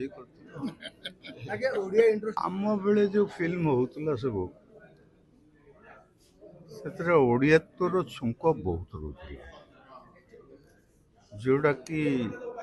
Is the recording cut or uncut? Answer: cut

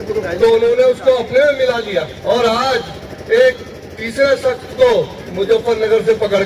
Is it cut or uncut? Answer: cut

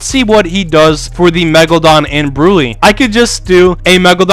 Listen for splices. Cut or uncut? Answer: cut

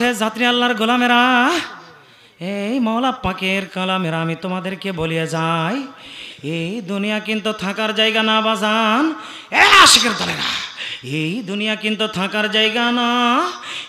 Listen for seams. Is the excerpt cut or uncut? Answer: uncut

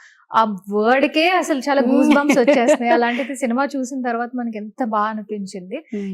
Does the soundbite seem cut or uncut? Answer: uncut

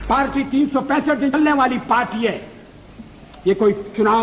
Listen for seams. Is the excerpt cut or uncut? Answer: cut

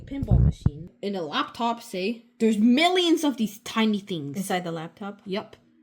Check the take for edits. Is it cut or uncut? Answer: cut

